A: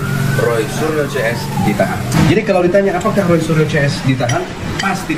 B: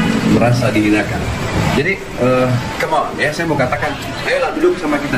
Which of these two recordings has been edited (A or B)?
A